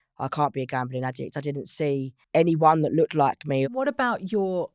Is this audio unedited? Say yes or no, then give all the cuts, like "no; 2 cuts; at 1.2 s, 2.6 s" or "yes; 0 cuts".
no; 2 cuts; at 2.2 s, 3.7 s